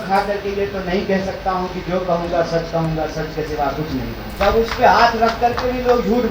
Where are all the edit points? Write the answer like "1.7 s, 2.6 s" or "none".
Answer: 4.3 s

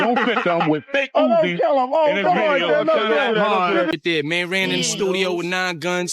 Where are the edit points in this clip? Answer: 3.7 s

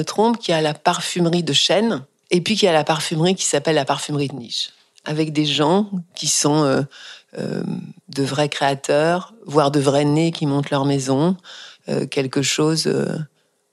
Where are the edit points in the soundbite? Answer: 2.1 s

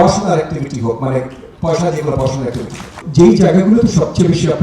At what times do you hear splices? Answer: 3.0 s

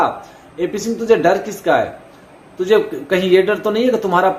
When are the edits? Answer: none

